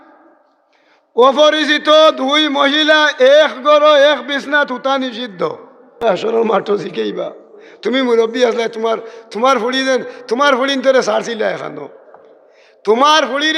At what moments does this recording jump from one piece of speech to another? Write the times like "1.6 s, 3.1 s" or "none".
6.0 s